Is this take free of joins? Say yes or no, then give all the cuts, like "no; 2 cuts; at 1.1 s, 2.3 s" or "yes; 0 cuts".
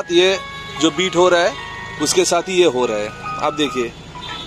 yes; 0 cuts